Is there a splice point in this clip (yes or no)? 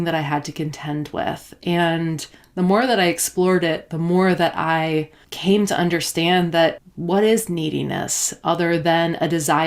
yes